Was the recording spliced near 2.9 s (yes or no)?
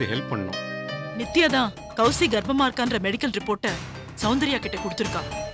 no